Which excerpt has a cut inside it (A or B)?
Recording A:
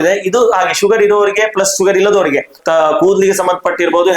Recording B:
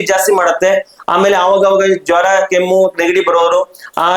A